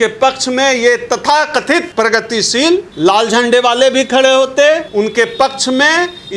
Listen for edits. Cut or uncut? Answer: cut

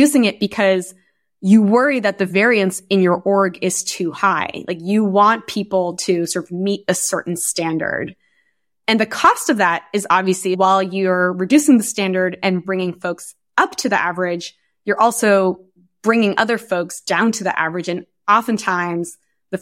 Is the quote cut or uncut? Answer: cut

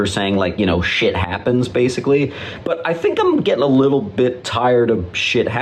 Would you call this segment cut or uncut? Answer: uncut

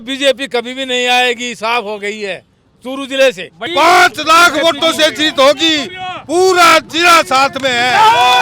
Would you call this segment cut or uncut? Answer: cut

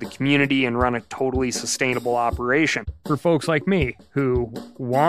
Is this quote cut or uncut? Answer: cut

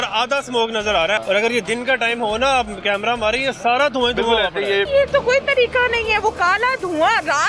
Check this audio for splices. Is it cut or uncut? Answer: cut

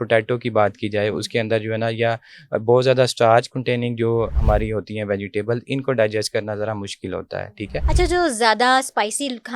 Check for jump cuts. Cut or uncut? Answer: cut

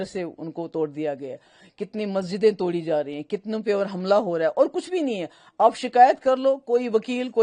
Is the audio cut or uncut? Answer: uncut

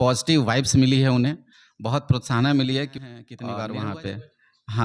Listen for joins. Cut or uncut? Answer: cut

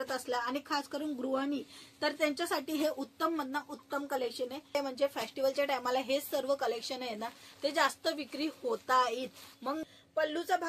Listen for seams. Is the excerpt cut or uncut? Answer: cut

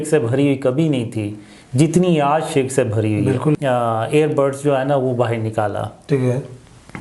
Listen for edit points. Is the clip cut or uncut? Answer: cut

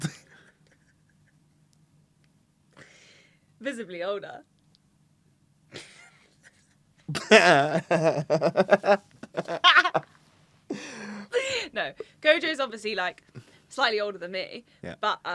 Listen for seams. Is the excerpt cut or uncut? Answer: uncut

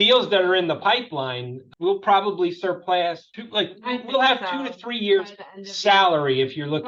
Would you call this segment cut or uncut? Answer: uncut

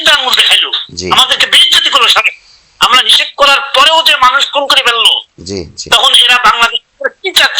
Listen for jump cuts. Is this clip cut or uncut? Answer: uncut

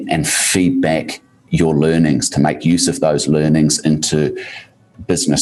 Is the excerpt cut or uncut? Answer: uncut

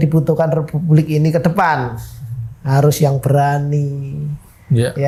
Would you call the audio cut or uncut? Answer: uncut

